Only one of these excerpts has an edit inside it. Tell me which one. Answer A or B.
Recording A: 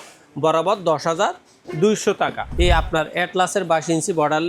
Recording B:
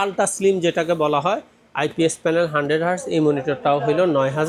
A